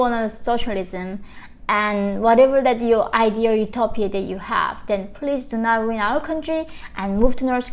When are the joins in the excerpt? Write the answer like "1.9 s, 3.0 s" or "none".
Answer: none